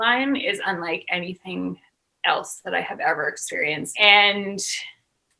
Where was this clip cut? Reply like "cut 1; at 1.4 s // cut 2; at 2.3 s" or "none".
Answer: cut 1; at 3.9 s